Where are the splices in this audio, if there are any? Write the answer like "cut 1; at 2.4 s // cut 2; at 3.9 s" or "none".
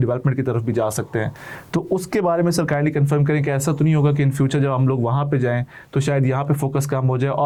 none